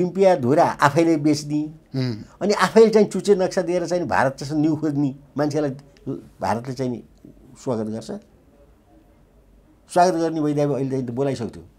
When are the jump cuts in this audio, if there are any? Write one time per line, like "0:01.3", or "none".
none